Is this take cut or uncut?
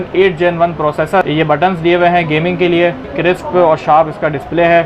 cut